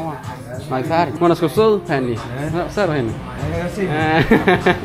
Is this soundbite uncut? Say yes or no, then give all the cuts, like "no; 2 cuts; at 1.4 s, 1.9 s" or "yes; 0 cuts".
no; 1 cut; at 1.1 s